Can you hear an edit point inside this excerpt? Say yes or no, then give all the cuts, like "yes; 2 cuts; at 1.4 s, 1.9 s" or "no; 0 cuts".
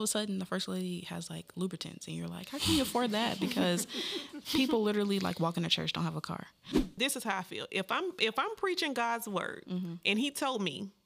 yes; 2 cuts; at 7.0 s, 10.0 s